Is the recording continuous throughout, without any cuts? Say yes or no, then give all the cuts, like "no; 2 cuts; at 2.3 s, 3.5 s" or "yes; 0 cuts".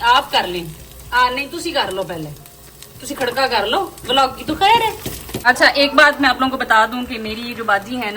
no; 1 cut; at 5.3 s